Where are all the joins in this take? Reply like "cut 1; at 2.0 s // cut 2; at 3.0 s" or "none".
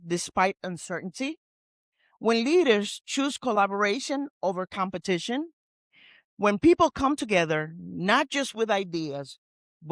none